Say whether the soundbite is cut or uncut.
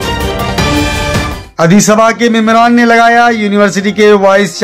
cut